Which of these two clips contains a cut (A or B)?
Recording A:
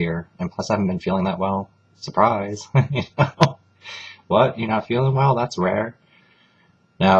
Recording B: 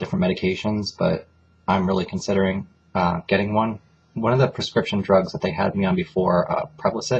B